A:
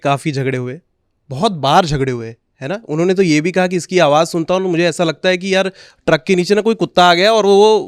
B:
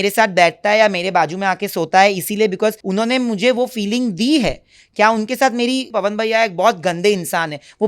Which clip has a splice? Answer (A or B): B